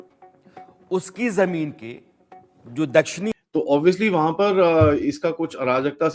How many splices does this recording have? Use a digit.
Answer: 1